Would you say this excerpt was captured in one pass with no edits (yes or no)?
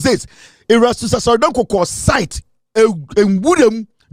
yes